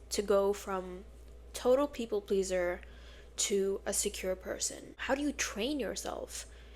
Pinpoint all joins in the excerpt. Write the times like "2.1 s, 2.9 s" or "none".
4.9 s